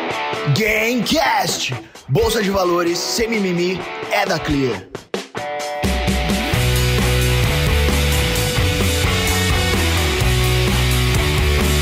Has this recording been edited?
no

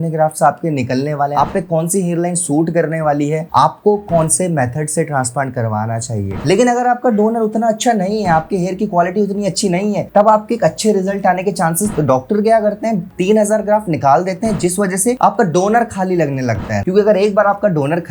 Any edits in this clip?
yes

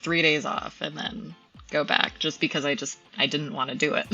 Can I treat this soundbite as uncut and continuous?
yes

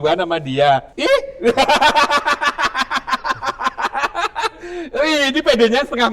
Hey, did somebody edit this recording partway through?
yes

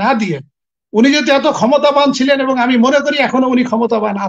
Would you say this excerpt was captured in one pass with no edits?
yes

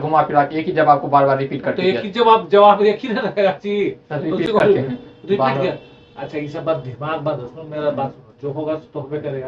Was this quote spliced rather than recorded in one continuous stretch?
no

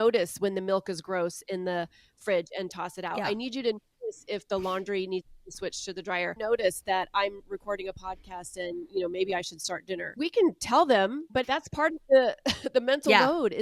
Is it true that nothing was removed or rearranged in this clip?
no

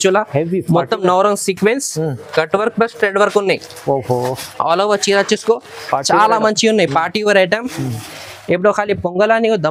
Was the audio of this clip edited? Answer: no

